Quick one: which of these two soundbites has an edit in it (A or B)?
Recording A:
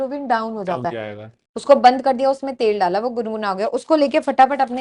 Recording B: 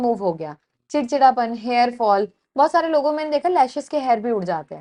A